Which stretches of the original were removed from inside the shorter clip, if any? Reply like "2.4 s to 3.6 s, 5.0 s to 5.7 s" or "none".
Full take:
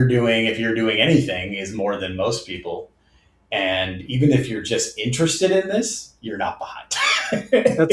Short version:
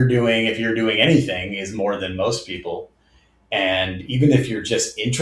none